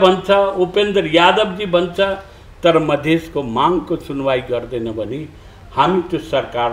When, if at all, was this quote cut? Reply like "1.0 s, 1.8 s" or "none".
none